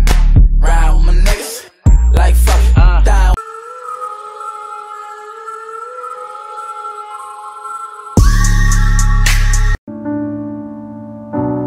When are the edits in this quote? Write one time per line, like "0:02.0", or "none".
0:04.3